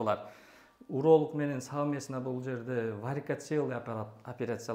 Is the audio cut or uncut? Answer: uncut